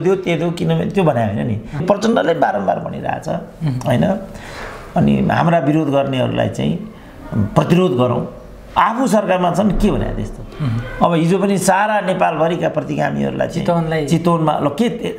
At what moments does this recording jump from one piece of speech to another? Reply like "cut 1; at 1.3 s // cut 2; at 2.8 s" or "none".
cut 1; at 1.8 s